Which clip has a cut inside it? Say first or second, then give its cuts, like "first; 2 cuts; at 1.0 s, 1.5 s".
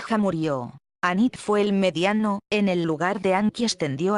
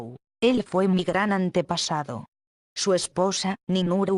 second; 1 cut; at 1.0 s